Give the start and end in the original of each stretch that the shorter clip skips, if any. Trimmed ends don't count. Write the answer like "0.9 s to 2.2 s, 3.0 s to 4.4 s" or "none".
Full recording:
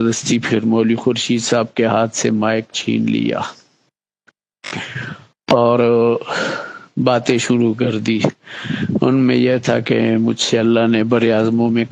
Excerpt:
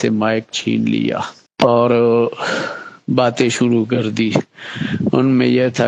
3.6 s to 5.3 s